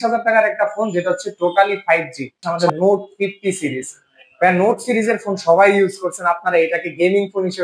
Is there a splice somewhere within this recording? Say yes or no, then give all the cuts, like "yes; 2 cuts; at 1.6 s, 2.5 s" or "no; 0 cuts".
yes; 1 cut; at 2.4 s